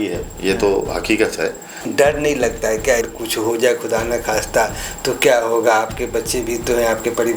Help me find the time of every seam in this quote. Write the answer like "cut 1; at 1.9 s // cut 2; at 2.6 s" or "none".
cut 1; at 1.9 s // cut 2; at 3.1 s